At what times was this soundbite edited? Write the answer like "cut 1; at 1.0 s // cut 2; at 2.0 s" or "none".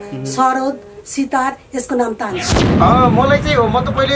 cut 1; at 2.6 s